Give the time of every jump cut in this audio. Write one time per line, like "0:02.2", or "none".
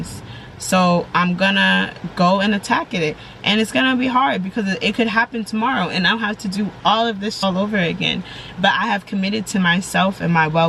0:07.4